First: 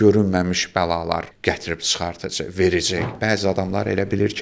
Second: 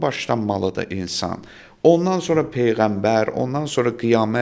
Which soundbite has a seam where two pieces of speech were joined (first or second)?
first